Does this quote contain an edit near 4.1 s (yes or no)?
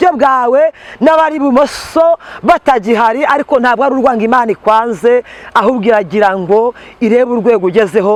no